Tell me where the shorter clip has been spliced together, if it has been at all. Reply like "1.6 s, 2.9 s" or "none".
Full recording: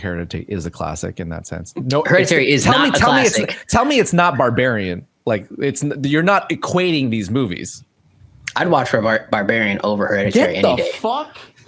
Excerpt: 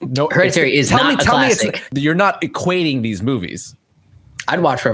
1.8 s